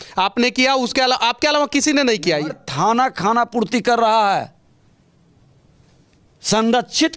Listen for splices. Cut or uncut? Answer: cut